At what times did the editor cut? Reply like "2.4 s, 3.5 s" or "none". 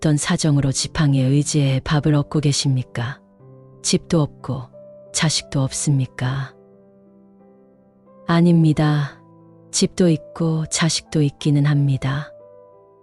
none

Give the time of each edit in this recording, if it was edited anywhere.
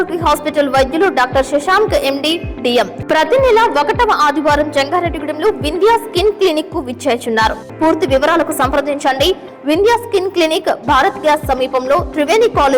3.0 s, 7.6 s

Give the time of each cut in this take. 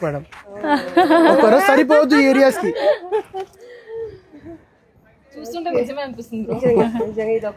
none

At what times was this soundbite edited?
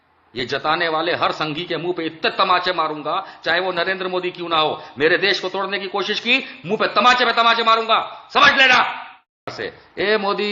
9.6 s

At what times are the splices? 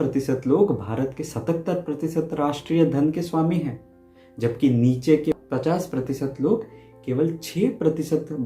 5.4 s

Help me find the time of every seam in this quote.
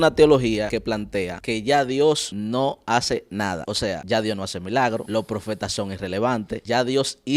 0.8 s, 2.3 s, 3.9 s, 5.1 s, 6.6 s

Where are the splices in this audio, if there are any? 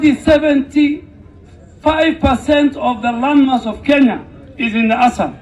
none

